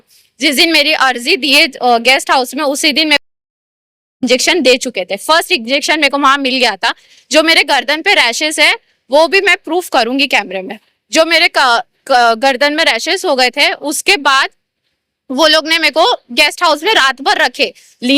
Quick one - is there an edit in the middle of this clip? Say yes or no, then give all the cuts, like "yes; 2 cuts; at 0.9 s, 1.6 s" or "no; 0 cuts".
no; 0 cuts